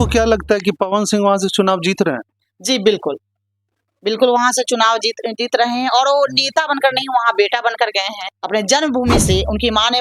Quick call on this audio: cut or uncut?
cut